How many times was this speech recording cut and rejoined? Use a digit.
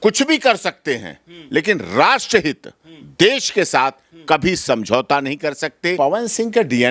1